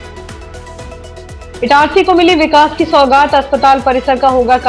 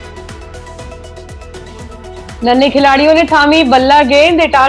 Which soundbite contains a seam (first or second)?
first